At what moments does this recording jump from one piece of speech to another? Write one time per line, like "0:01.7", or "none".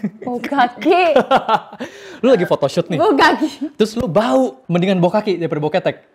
none